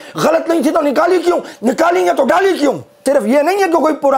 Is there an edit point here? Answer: yes; 1 cut; at 3.0 s

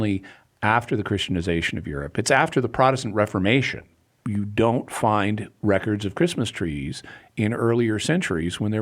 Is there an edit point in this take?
yes; 1 cut; at 4.0 s

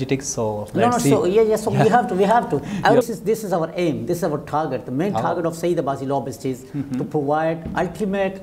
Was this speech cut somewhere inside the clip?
yes; 1 cut; at 3.0 s

